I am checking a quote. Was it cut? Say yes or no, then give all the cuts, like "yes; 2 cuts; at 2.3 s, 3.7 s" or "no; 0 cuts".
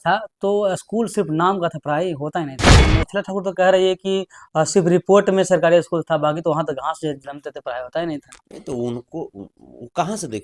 yes; 1 cut; at 2.8 s